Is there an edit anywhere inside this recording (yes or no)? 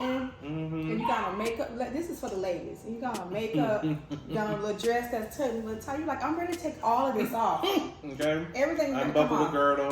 no